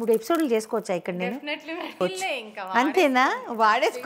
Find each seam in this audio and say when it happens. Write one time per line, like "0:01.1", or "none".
0:01.9